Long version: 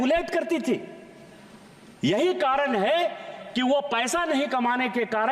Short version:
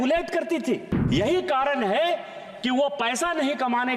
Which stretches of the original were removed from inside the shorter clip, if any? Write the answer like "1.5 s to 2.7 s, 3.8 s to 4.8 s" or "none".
0.9 s to 1.9 s

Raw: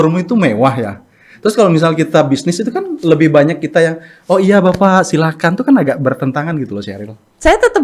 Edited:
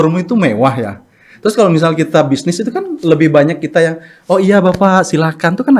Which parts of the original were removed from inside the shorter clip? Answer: none

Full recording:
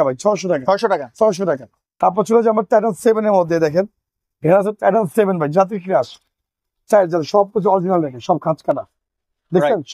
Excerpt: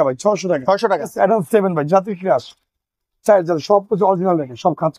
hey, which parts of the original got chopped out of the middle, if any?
1.1 s to 4.7 s

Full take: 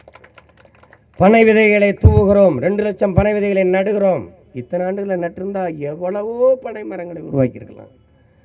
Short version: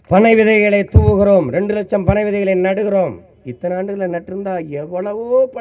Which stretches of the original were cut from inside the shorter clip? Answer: none

